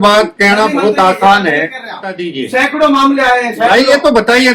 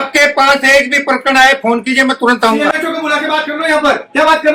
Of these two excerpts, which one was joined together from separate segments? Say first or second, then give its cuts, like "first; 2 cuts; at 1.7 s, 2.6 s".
first; 1 cut; at 2.3 s